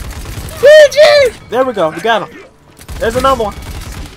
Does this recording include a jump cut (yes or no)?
yes